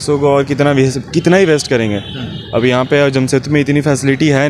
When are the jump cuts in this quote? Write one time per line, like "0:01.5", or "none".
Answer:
none